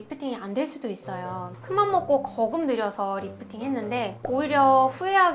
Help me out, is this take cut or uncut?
uncut